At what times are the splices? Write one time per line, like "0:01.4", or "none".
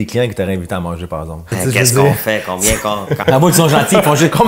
0:01.5